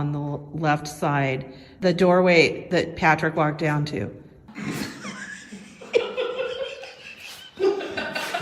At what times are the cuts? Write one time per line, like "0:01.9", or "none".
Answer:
0:01.7
0:02.6
0:04.4